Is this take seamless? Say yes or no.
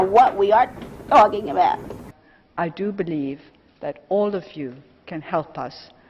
no